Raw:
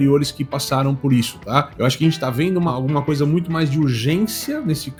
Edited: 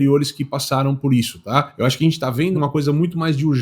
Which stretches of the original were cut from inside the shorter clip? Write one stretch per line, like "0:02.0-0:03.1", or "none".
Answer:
0:02.6-0:02.9

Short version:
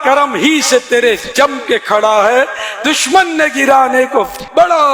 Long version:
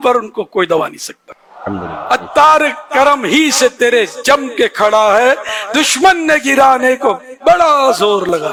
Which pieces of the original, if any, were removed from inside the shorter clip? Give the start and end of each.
none

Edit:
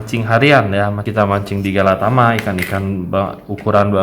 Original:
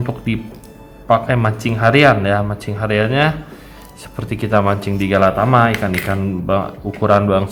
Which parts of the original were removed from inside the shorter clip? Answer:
0:02.6-0:04.4

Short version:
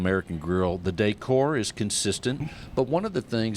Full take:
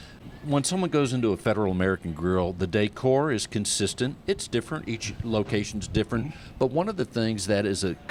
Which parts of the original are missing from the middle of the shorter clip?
0:04.2-0:06.3

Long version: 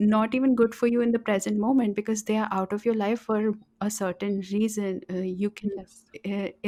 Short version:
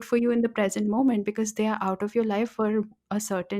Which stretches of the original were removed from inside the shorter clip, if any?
none

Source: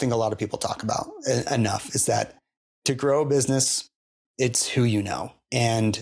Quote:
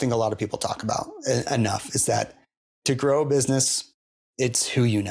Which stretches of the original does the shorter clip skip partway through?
none

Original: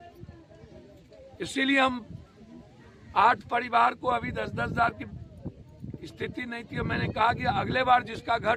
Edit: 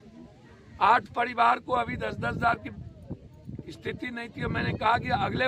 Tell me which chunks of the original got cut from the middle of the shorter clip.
none

